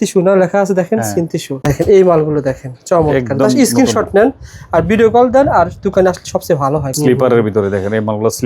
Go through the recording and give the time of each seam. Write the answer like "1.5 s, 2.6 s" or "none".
1.7 s, 6.9 s